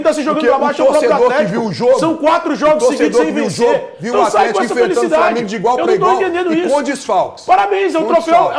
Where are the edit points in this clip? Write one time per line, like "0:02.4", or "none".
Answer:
none